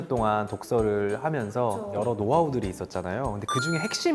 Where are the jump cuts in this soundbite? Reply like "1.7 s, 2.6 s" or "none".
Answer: 1.9 s